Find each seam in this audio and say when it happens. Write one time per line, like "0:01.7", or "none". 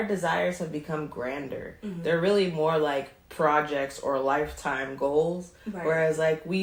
none